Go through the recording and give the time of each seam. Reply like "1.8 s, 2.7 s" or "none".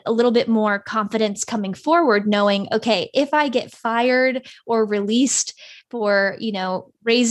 none